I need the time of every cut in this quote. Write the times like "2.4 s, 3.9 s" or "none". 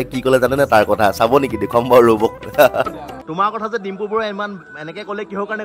none